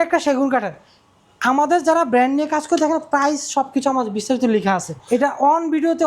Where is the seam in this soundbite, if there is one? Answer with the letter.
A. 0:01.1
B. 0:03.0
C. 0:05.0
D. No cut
C